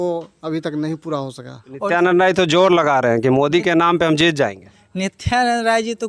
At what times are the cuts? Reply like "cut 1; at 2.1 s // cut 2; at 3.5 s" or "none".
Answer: cut 1; at 1.7 s